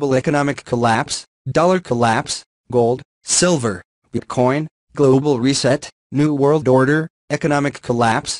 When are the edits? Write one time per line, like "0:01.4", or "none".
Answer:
none